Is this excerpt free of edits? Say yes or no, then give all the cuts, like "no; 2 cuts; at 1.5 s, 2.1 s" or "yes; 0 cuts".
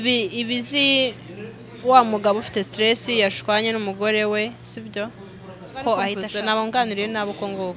no; 1 cut; at 6.2 s